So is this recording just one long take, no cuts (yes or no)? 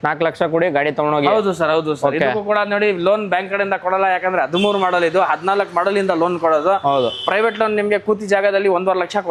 yes